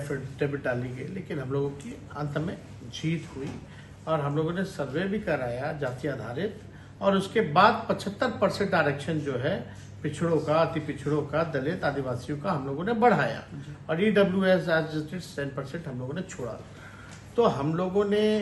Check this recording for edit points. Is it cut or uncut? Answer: uncut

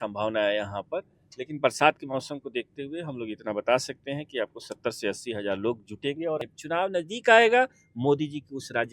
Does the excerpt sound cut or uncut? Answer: cut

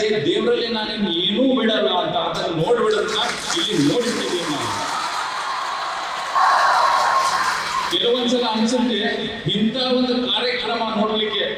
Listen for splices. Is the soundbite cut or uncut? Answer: uncut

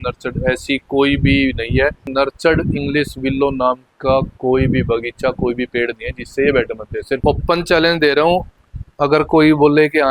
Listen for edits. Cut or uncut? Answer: cut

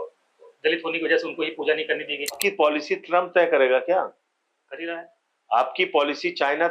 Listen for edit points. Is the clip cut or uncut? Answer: cut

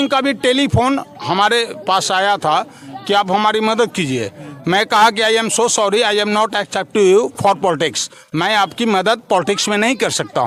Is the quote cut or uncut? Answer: uncut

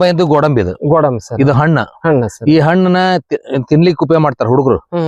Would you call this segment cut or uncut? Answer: uncut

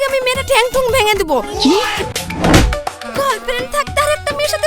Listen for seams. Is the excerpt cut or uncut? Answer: cut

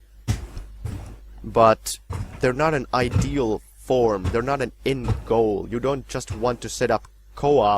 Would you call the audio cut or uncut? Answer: cut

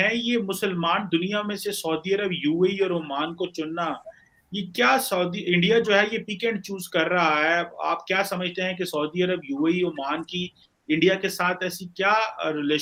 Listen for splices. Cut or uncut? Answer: uncut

